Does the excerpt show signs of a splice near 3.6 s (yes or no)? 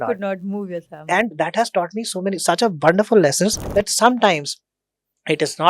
yes